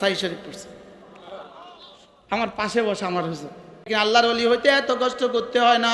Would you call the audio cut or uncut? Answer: cut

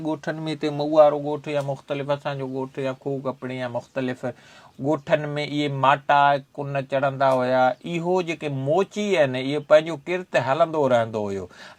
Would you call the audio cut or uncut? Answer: uncut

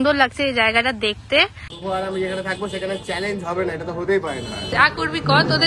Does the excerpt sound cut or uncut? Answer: cut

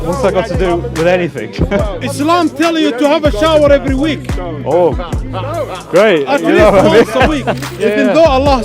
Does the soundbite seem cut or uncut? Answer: cut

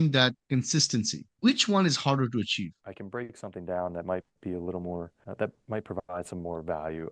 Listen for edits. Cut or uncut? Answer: cut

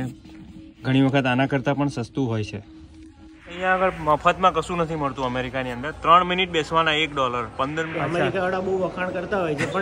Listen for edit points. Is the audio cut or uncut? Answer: cut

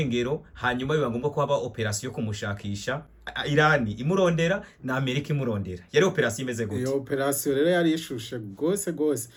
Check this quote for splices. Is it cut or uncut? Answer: uncut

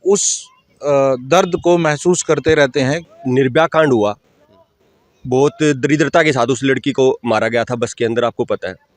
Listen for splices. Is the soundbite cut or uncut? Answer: cut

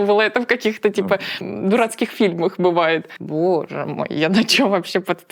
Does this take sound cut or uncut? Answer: cut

